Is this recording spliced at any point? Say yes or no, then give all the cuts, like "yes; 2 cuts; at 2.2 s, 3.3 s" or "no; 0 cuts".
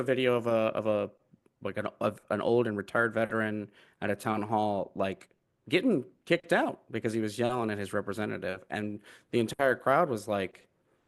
no; 0 cuts